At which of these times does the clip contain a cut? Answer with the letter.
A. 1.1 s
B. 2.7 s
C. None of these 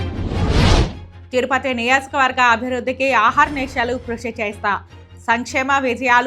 A